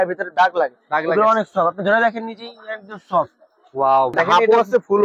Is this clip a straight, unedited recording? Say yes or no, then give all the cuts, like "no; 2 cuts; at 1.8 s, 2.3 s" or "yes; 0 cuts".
no; 1 cut; at 4.1 s